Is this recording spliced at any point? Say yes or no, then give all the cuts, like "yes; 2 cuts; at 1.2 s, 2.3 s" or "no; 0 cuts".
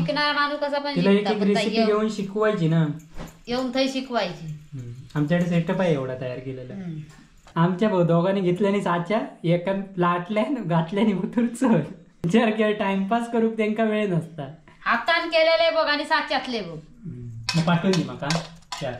yes; 2 cuts; at 7.5 s, 12.3 s